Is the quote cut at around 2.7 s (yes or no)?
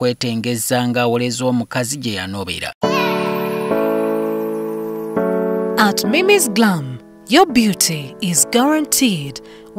yes